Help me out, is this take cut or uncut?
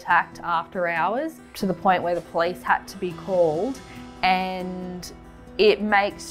uncut